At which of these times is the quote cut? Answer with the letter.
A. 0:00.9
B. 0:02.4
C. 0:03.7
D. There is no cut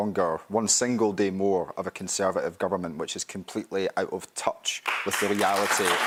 D